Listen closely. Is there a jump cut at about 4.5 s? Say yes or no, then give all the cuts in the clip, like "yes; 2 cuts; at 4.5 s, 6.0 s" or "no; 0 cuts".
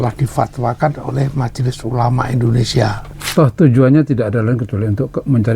no; 1 cut; at 3.2 s